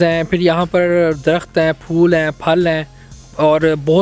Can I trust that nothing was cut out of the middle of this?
yes; 0 cuts

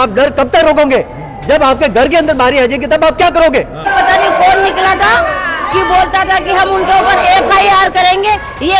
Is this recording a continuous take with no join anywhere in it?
no; 1 cut; at 3.9 s

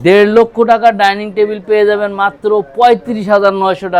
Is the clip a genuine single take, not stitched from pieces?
yes; 0 cuts

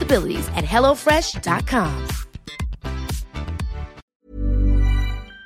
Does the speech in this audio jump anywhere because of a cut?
yes; 1 cut; at 4.0 s

